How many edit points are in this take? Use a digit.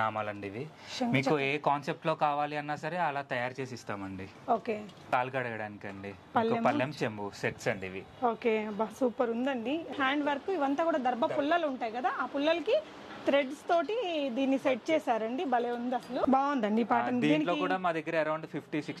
3